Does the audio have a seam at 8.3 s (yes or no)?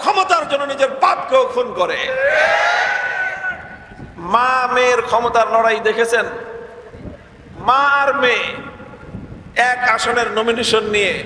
no